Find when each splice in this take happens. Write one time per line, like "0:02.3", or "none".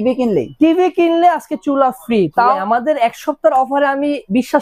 0:02.6